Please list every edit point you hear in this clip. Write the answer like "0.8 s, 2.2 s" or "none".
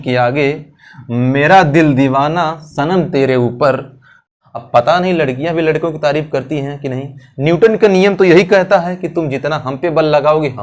4.3 s